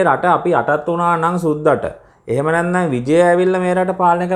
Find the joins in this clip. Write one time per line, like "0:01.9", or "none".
none